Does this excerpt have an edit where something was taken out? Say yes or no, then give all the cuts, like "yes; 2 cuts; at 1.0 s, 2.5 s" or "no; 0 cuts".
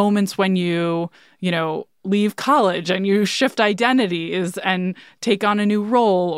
no; 0 cuts